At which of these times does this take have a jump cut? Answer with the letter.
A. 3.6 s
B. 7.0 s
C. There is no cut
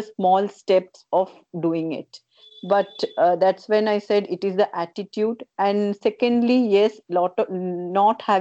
C